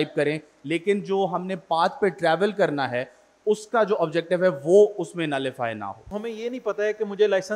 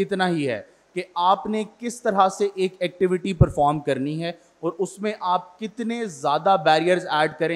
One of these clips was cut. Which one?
first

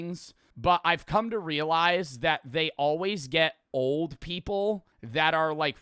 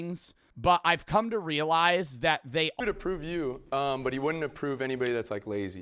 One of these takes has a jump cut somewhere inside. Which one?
first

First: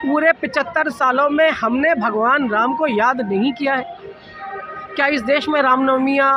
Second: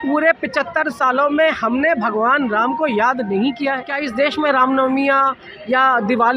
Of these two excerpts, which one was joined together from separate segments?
second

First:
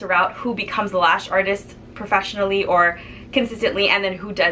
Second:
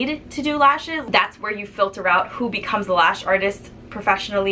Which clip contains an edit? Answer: second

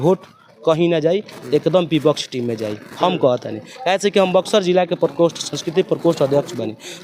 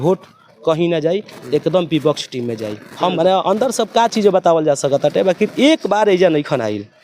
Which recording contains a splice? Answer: second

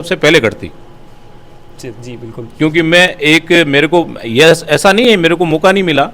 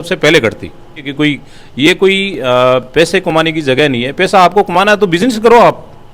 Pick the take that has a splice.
second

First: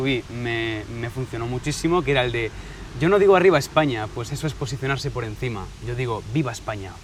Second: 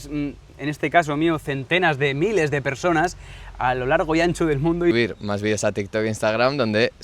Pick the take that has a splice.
second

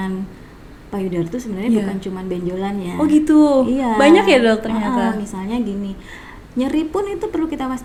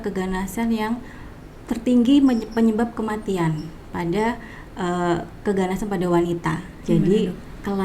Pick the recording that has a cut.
second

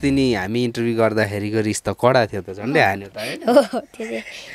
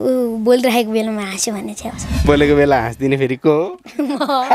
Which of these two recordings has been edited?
second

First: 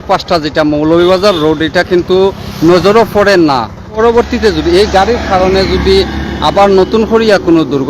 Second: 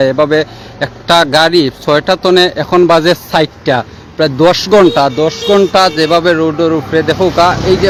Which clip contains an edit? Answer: first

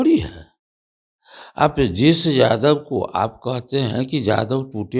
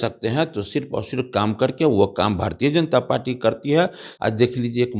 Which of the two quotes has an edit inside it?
second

